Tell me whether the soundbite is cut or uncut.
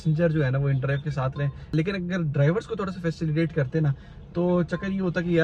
uncut